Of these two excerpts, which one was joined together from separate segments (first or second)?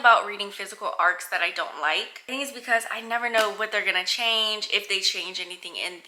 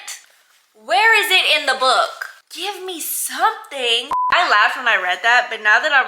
second